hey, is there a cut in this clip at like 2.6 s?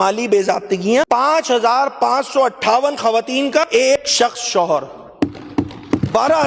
no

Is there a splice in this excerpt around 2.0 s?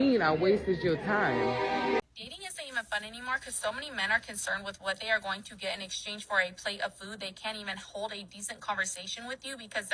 yes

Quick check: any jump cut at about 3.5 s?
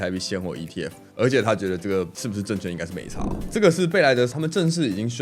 yes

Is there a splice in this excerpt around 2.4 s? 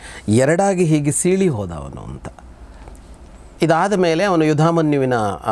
no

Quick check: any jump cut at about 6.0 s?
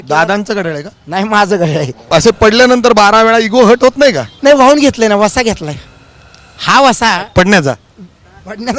no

